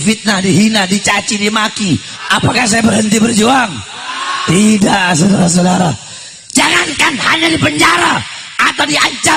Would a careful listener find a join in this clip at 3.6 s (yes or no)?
no